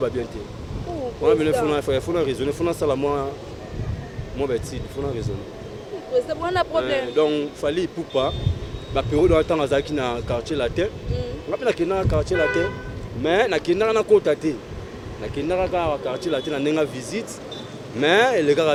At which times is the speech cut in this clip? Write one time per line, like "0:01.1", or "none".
none